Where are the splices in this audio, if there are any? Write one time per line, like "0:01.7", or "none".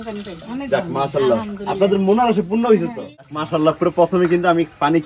0:03.4

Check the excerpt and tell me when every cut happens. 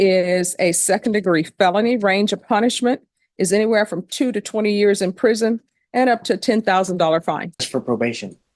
0:01.9
0:05.8
0:07.6

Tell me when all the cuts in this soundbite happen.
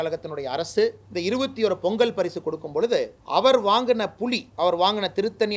0:01.0
0:03.2
0:04.5

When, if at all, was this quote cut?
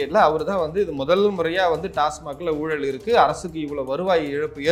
none

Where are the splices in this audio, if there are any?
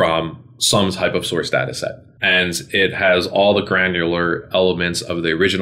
0:02.1

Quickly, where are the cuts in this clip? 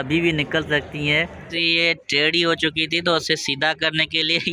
0:01.4

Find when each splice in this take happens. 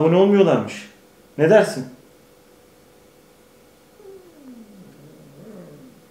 none

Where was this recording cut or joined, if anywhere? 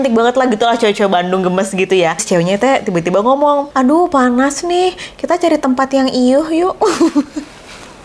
0:02.2
0:03.7

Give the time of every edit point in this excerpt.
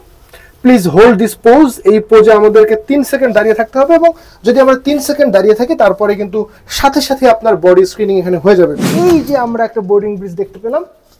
0:08.8

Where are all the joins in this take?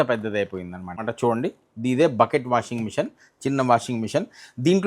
0:01.1

